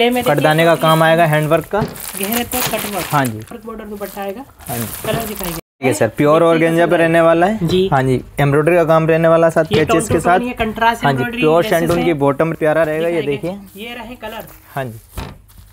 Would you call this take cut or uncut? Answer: cut